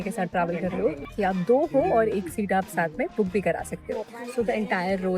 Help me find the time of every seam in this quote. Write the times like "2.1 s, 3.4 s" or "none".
1.0 s, 4.2 s